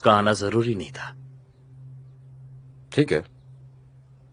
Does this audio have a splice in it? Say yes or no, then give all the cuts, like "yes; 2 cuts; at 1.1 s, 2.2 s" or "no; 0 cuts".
no; 0 cuts